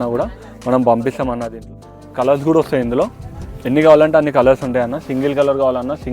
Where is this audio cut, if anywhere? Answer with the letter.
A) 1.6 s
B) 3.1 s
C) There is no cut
A